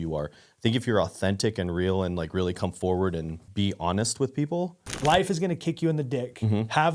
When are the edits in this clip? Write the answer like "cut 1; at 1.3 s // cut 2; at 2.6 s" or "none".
cut 1; at 3.4 s // cut 2; at 5.0 s